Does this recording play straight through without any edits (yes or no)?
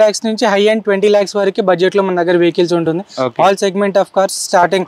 yes